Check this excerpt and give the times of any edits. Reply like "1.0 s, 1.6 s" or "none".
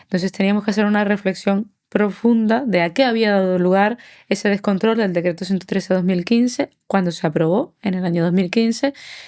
none